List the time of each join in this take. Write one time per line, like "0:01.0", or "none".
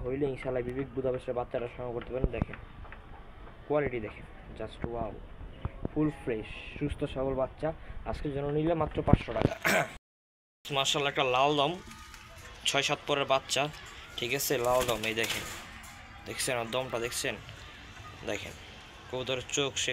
none